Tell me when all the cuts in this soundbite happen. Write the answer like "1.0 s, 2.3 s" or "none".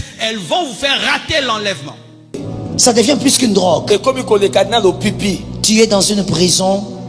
2.4 s